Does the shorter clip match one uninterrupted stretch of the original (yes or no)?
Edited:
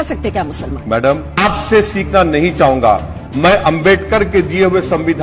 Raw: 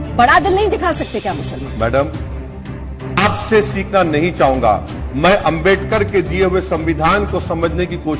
no